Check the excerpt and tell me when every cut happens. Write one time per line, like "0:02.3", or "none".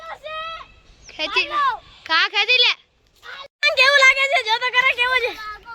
0:03.4